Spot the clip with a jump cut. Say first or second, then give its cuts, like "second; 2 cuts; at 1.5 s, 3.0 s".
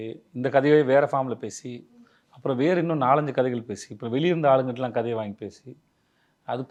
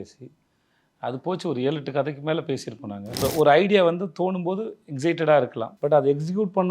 second; 2 cuts; at 3.2 s, 5.6 s